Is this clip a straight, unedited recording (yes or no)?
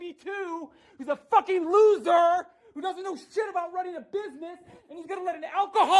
no